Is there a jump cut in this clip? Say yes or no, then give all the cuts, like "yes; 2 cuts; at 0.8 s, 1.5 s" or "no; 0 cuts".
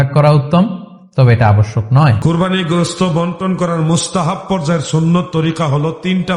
yes; 1 cut; at 2.2 s